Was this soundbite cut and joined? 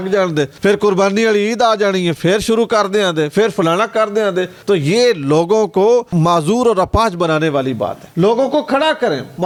no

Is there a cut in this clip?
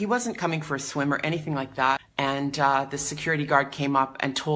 yes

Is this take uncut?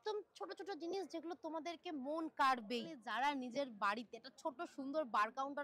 no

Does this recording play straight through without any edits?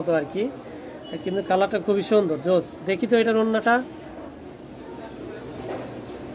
yes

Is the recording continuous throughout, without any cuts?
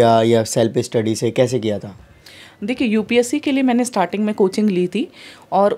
yes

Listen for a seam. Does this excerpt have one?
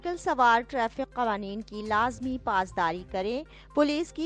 no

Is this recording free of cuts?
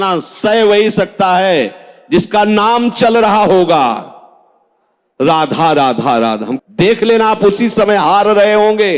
no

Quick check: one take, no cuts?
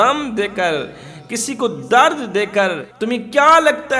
no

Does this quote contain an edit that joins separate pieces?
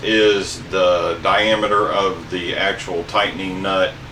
no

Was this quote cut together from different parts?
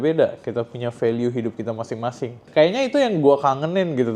yes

